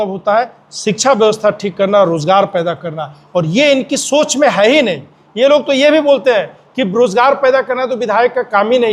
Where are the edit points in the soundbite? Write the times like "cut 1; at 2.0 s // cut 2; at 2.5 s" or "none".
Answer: none